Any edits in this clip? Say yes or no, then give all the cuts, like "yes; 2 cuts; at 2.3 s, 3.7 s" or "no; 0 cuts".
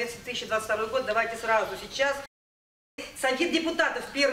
yes; 1 cut; at 2.7 s